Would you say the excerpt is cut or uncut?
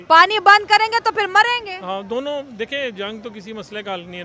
uncut